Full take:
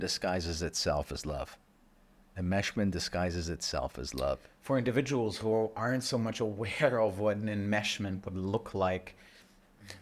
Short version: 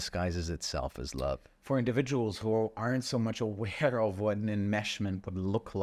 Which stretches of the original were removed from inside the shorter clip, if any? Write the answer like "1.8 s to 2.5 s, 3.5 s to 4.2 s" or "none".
none

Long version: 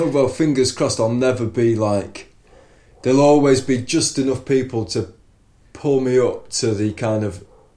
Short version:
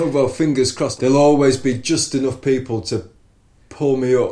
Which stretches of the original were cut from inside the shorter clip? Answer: 0.9 s to 3.0 s

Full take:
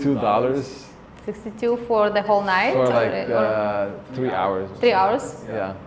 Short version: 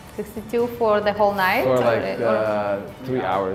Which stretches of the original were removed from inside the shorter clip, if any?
none

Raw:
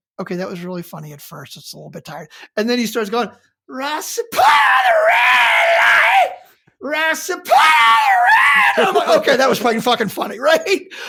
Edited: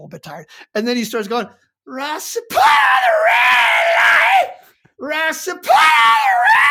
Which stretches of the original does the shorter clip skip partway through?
none

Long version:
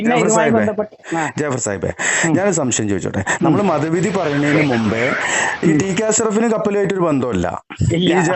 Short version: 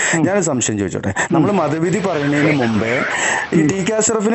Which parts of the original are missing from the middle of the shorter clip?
none

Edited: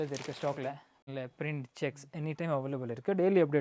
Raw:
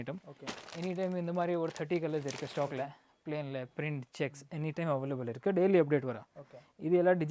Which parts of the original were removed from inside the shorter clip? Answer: 3.2 s to 3.5 s

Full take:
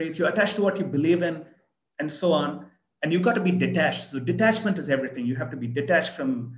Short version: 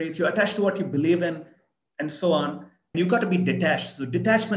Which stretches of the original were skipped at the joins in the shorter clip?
2.8 s to 2.9 s

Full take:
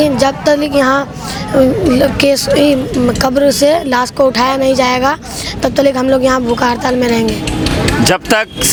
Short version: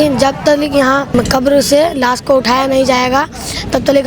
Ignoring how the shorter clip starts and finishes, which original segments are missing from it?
1.1 s to 3.0 s

